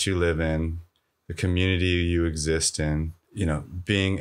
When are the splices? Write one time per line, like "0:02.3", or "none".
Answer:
0:03.2